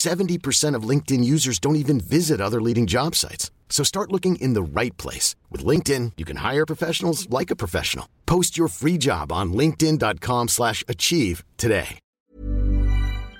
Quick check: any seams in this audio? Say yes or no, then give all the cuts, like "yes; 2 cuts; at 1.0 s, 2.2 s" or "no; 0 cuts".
yes; 1 cut; at 12.0 s